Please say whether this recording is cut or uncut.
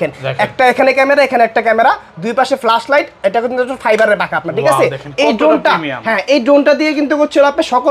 uncut